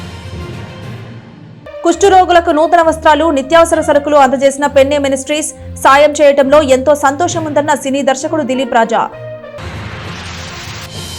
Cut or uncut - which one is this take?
cut